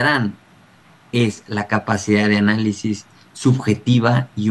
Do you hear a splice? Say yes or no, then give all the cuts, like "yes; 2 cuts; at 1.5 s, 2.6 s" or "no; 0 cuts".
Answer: no; 0 cuts